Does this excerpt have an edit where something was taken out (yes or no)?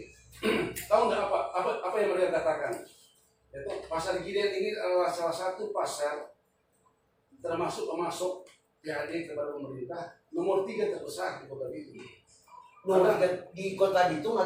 no